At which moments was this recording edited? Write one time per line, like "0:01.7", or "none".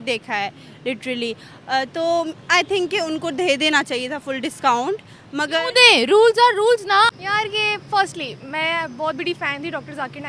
0:07.1